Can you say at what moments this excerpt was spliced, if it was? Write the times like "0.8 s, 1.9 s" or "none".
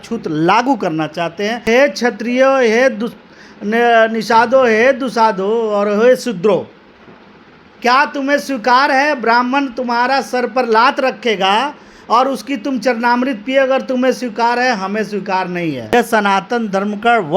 1.7 s, 15.9 s